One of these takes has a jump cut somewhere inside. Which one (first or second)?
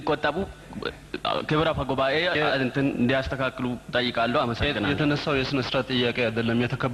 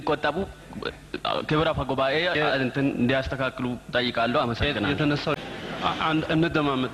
second